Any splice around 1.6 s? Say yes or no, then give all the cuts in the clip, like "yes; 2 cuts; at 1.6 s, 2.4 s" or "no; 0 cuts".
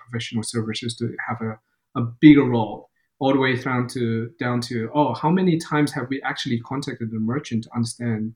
no; 0 cuts